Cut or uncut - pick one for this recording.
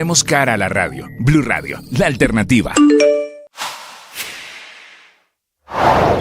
cut